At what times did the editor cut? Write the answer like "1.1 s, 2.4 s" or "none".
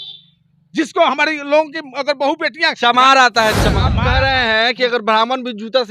3.9 s